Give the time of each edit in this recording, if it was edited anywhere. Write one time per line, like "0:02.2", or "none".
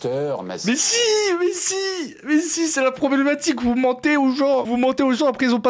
0:04.7